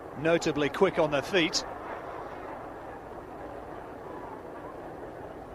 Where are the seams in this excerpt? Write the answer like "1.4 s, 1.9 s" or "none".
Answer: none